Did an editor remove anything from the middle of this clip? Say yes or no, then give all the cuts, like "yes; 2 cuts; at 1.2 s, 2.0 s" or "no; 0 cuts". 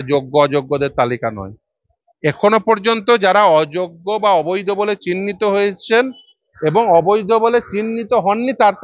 no; 0 cuts